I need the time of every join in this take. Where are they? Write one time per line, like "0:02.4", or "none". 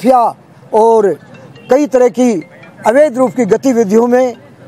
none